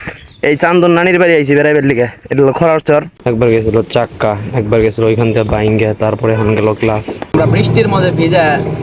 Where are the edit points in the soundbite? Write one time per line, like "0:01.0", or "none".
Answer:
0:03.1
0:07.3